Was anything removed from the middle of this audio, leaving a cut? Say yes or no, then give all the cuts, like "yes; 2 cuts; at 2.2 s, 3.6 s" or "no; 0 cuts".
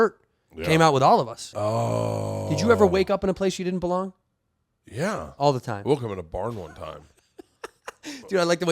yes; 1 cut; at 1.4 s